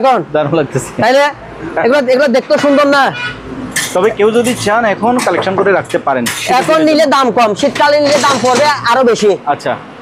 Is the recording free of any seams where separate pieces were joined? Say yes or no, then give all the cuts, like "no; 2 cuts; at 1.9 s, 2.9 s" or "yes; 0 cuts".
yes; 0 cuts